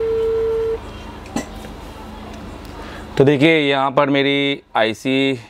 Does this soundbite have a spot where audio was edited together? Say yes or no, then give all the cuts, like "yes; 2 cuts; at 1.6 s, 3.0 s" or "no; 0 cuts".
no; 0 cuts